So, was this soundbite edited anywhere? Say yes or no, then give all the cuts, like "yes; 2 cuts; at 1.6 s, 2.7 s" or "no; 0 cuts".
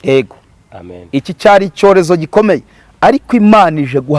no; 0 cuts